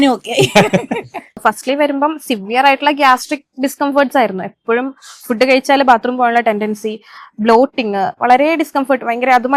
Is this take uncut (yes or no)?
no